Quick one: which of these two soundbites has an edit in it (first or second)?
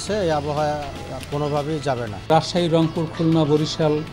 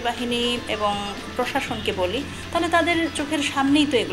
first